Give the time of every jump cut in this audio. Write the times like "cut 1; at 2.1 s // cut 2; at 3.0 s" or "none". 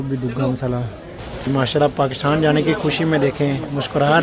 cut 1; at 1.5 s